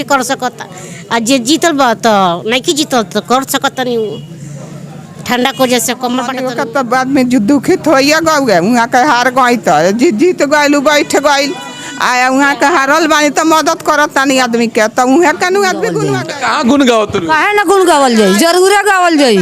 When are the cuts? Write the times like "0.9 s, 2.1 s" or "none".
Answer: 6.4 s, 16.1 s